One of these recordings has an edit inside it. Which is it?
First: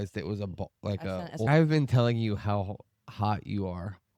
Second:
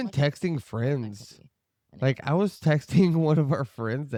first; 1 cut; at 1.5 s

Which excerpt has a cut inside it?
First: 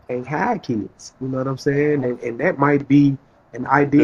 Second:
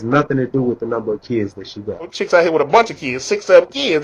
second; 1 cut; at 2.2 s

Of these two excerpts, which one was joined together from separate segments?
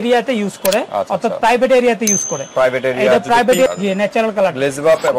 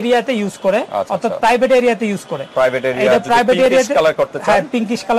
first; 1 cut; at 3.7 s

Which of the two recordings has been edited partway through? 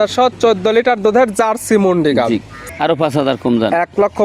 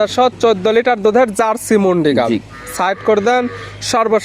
first; 1 cut; at 2.6 s

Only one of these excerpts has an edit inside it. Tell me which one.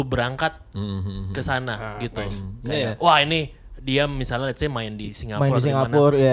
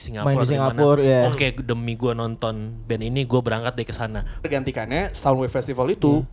second; 1 cut; at 4.5 s

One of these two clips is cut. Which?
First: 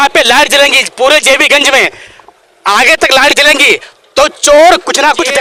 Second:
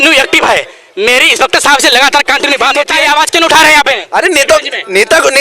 second; 1 cut; at 2.9 s

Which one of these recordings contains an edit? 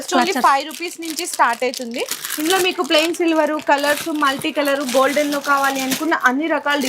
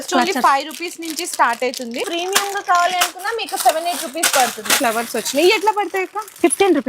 second; 2 cuts; at 2.1 s, 4.8 s

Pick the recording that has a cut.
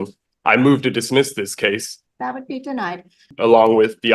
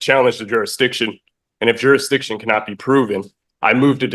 first; 2 cuts; at 1.9 s, 3.3 s

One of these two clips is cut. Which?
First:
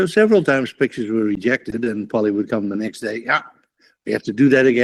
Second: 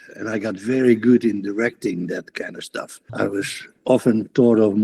second; 1 cut; at 3.1 s

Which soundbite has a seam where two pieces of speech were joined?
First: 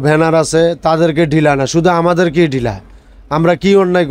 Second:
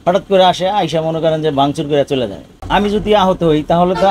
second; 1 cut; at 2.4 s

